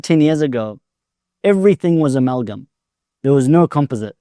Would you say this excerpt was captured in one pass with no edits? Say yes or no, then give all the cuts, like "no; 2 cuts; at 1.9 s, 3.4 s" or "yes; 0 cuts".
yes; 0 cuts